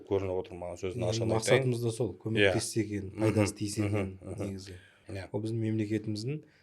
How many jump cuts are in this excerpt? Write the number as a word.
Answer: one